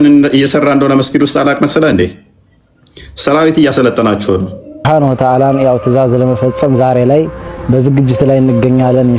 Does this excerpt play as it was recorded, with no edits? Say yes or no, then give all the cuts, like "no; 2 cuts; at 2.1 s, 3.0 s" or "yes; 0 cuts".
no; 1 cut; at 4.8 s